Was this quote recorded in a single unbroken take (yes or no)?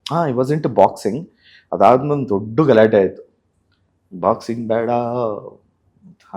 yes